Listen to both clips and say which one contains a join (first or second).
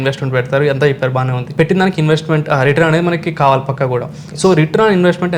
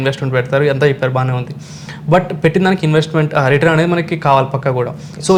first